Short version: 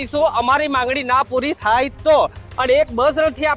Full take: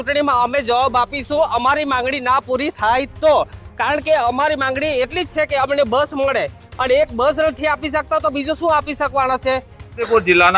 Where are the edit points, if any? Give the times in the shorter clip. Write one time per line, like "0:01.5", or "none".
0:02.4